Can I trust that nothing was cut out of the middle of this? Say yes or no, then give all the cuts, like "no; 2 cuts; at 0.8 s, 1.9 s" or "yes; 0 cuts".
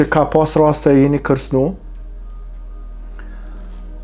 yes; 0 cuts